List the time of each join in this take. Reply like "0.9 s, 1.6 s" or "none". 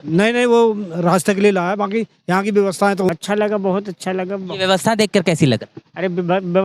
3.1 s